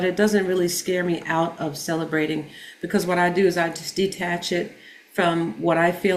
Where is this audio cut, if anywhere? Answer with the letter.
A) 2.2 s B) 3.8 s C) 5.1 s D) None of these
D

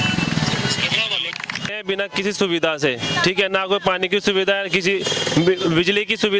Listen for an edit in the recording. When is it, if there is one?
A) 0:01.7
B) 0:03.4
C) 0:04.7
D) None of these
A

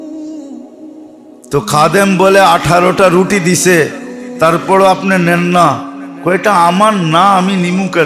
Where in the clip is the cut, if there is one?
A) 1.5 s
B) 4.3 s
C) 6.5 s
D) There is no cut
A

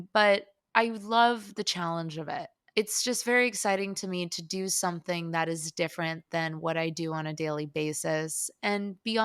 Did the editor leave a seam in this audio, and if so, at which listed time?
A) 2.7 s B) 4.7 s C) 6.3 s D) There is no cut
D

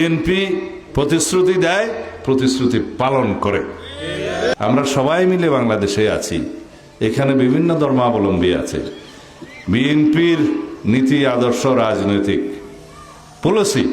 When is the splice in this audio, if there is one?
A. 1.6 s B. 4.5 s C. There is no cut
B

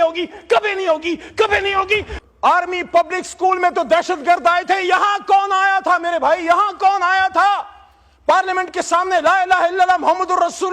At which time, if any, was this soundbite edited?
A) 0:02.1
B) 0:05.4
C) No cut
A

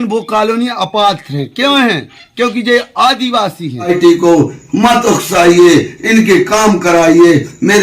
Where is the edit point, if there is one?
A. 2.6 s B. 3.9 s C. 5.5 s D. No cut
B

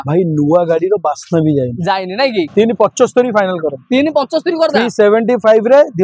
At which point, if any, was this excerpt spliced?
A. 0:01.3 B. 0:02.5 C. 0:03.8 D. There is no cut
B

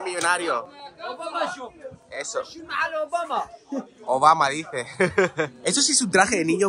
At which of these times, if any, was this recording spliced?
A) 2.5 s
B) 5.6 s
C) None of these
B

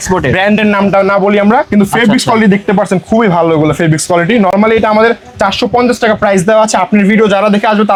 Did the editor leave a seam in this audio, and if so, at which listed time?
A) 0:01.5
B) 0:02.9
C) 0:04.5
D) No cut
D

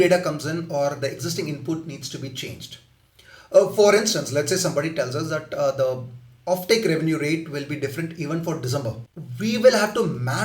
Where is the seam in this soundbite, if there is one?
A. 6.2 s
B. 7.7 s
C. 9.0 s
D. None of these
C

